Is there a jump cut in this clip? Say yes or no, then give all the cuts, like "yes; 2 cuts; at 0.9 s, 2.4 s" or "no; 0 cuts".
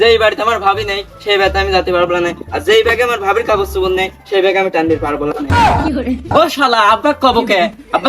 yes; 1 cut; at 6.3 s